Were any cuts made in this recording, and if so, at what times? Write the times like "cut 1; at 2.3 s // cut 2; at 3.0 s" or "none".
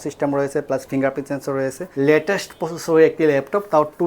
cut 1; at 1.8 s